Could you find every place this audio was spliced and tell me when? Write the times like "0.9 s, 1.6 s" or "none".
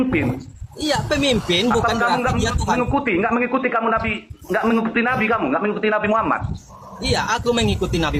none